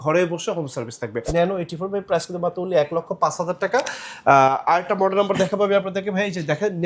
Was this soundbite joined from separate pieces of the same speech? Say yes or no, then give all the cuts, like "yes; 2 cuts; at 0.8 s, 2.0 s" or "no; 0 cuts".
yes; 1 cut; at 1.2 s